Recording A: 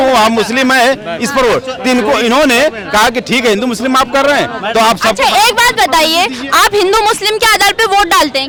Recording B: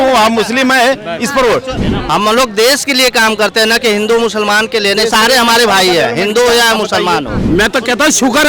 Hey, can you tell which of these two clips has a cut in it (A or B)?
B